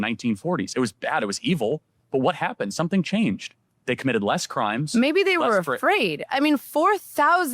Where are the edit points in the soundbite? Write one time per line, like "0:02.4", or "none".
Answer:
0:03.5